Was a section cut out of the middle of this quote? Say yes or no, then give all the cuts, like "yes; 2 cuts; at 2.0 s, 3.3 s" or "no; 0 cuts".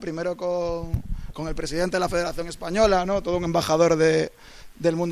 no; 0 cuts